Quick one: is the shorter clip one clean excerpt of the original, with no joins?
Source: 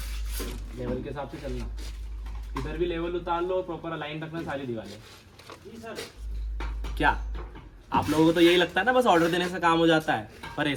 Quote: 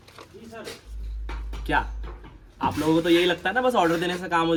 yes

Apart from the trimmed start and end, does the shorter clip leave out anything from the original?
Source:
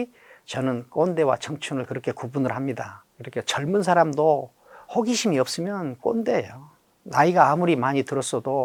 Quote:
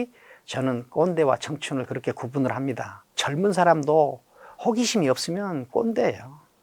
yes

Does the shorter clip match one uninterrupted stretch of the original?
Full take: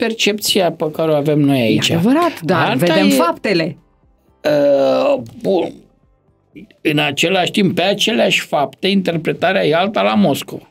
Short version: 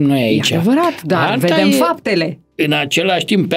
no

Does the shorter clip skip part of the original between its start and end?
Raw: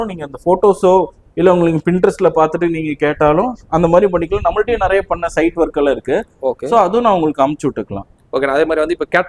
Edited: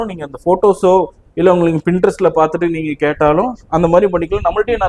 no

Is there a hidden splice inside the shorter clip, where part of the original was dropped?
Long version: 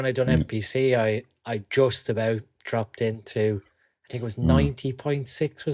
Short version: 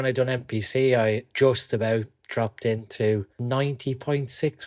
yes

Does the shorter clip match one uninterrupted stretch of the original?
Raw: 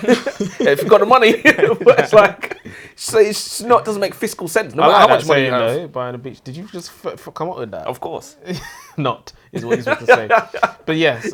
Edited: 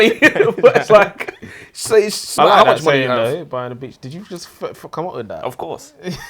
no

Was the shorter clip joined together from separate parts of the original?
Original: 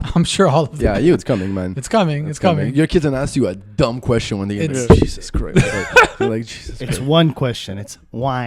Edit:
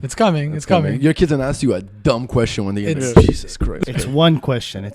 yes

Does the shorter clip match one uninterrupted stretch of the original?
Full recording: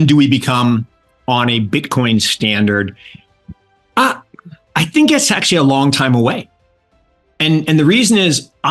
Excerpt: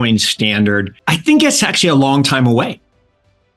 no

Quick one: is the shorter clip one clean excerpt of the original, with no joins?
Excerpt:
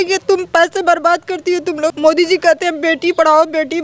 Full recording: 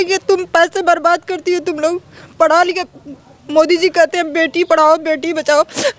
no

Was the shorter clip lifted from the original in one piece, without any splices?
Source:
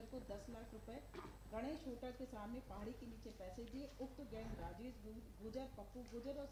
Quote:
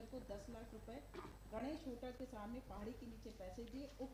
yes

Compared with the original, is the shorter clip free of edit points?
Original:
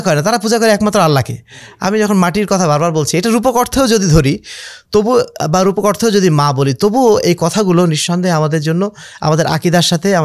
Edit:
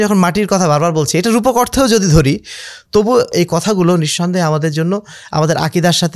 no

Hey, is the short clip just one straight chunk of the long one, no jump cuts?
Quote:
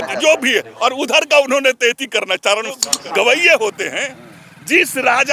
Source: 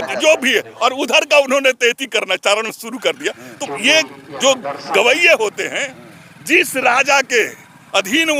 no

